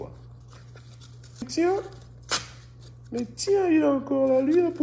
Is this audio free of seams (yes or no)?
no